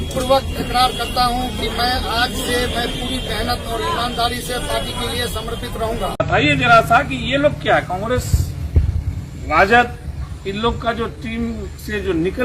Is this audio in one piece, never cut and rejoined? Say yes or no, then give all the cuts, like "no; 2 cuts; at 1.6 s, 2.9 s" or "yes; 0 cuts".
no; 1 cut; at 6.1 s